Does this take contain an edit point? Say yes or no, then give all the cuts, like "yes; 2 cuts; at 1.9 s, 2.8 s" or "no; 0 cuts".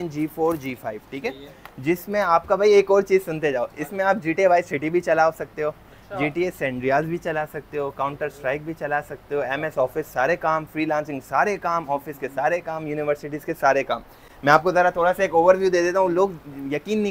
no; 0 cuts